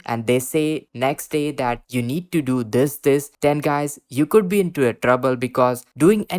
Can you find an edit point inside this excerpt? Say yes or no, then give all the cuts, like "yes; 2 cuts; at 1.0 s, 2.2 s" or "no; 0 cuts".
yes; 1 cut; at 3.3 s